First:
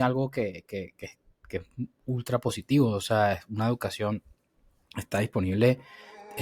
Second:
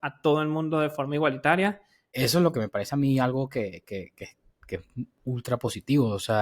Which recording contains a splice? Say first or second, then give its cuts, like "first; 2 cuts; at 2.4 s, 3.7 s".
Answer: second; 1 cut; at 2.1 s